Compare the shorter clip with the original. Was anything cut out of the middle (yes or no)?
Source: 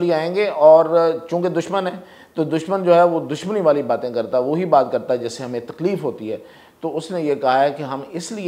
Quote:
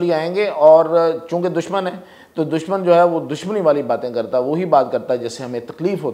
no